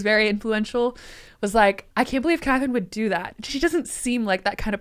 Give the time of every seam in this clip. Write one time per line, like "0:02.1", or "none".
0:01.8